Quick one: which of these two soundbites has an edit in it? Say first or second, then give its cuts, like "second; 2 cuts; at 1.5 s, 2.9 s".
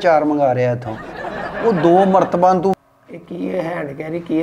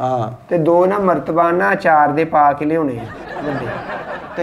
first; 1 cut; at 2.8 s